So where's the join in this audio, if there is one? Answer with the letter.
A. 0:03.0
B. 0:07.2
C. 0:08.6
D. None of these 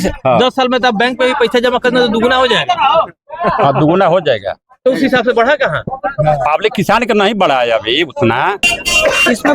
C